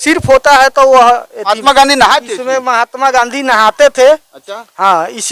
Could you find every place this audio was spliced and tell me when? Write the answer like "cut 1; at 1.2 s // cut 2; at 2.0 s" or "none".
cut 1; at 1.6 s